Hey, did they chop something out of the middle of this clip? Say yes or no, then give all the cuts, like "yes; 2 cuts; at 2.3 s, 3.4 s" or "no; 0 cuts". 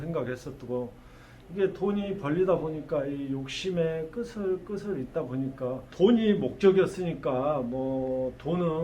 yes; 1 cut; at 5.9 s